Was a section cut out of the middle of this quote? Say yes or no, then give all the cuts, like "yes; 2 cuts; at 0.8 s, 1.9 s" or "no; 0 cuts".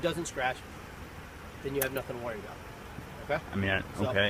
yes; 1 cut; at 2.9 s